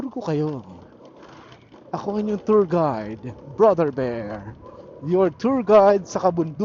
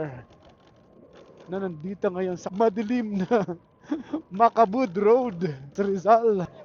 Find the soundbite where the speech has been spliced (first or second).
second